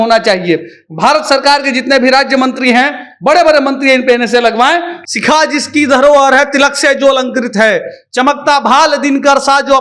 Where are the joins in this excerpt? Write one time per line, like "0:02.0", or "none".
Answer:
0:05.0